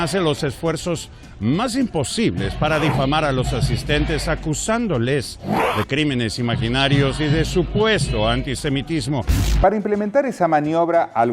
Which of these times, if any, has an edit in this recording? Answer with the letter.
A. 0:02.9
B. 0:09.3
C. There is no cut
C